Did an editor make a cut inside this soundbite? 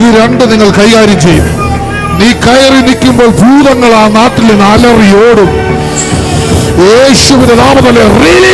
no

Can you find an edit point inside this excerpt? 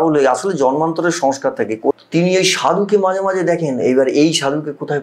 yes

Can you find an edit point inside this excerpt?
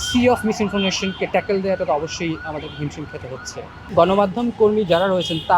yes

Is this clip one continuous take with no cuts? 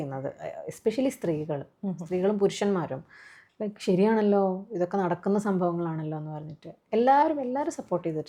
yes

